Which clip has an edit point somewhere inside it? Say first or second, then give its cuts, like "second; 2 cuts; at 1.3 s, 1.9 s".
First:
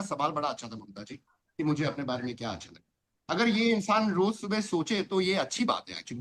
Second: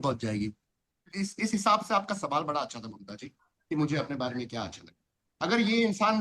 second; 1 cut; at 1.1 s